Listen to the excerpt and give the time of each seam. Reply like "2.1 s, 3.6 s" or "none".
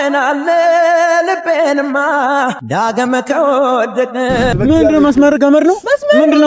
4.5 s